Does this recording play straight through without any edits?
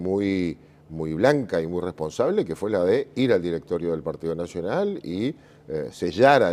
no; 1 cut; at 1.4 s

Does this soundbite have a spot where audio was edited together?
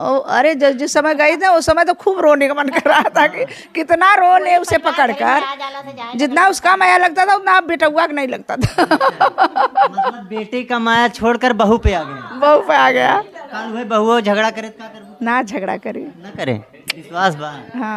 no; 0 cuts

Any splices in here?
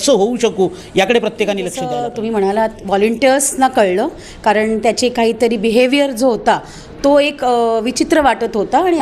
yes; 1 cut; at 1.8 s

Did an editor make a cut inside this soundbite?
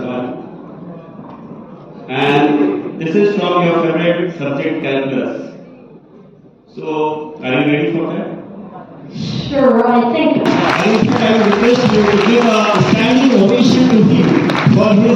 yes; 1 cut; at 10.4 s

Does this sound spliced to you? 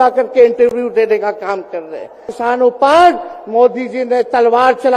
yes; 1 cut; at 2.3 s

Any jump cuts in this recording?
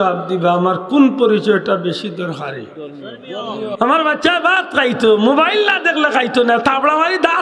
yes; 1 cut; at 3.8 s

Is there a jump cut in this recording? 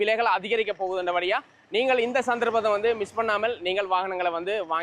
no; 0 cuts

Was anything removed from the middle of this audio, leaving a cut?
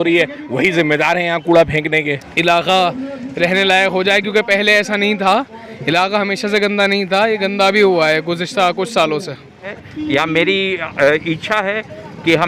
yes; 2 cuts; at 2.2 s, 9.8 s

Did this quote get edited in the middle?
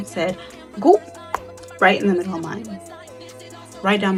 no; 0 cuts

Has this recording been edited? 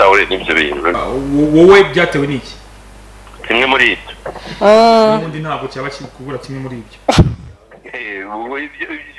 yes; 1 cut; at 0.9 s

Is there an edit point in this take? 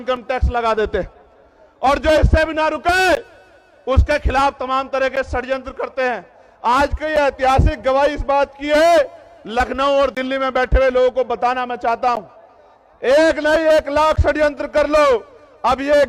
no; 0 cuts

